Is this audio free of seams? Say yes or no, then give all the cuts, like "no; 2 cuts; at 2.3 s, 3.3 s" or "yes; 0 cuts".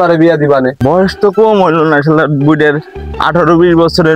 no; 1 cut; at 1.0 s